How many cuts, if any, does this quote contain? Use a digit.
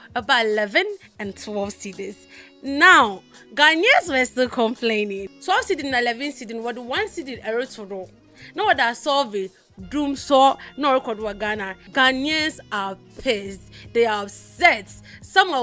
2